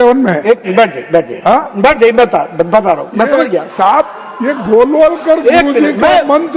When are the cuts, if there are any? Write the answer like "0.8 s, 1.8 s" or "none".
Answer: none